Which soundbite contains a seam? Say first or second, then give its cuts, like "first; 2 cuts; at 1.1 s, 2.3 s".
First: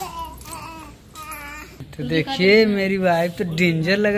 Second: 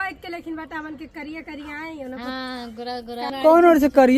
first; 1 cut; at 1.9 s